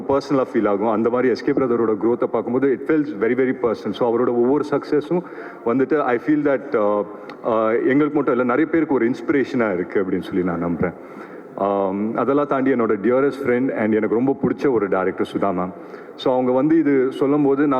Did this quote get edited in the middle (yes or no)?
no